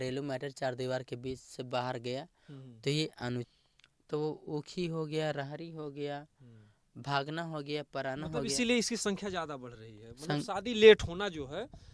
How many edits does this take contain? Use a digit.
1